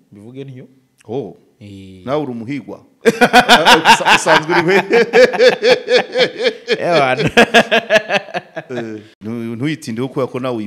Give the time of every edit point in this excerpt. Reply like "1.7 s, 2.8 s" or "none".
9.1 s